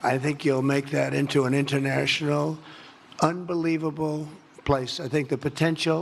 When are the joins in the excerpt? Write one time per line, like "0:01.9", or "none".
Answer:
0:01.4